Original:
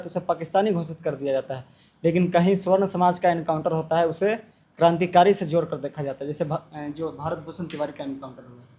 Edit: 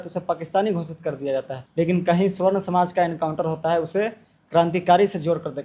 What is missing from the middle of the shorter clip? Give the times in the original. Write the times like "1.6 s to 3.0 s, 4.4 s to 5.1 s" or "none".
1.6 s to 1.9 s